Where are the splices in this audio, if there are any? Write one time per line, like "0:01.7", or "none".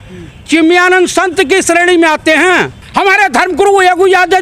0:02.8